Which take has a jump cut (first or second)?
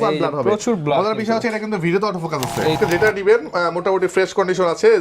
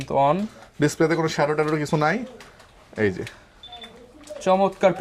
first